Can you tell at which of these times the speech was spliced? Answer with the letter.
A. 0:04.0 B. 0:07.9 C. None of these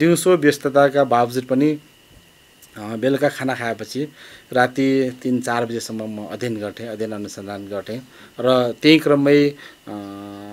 C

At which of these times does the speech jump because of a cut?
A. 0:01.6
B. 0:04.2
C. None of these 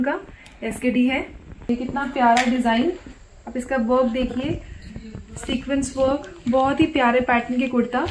A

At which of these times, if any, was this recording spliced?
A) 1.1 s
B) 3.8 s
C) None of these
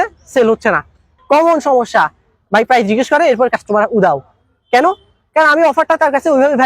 A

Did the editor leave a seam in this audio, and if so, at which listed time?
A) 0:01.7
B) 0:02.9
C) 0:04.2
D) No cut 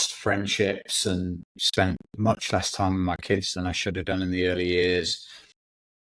A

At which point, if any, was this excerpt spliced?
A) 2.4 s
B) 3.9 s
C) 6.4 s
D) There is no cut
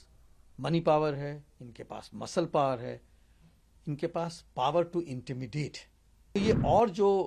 C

